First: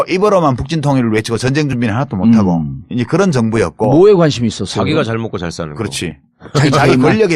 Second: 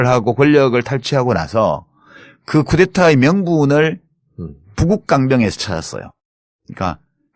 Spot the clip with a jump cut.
first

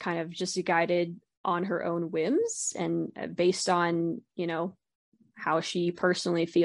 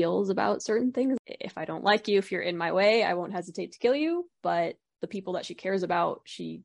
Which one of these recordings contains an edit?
second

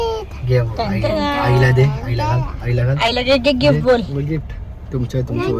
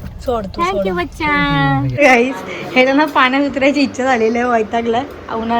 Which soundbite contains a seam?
second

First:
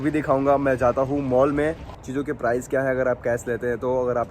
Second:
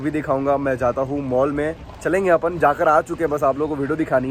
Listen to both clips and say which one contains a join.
first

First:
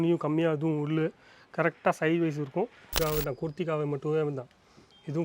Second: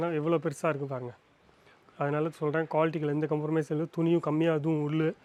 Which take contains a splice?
first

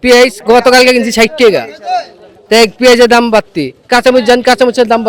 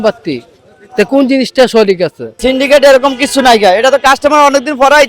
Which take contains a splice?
second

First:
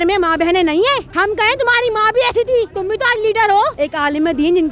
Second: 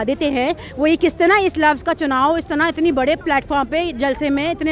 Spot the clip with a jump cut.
first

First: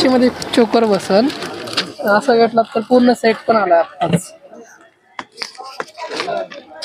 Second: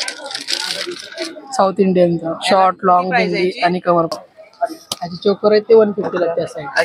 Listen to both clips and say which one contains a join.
second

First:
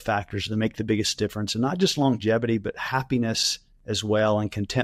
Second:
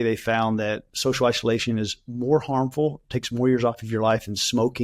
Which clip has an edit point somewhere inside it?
second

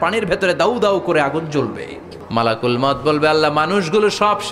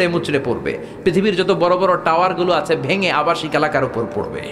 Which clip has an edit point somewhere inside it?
first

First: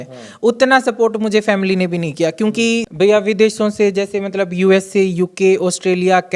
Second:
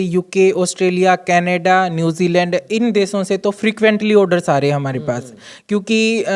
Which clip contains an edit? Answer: first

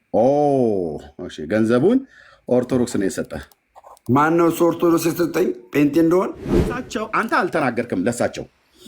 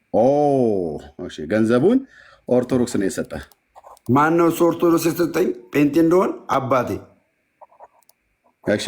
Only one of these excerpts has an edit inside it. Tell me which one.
first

